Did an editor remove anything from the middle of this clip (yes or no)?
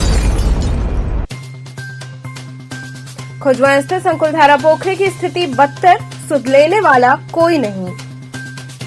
yes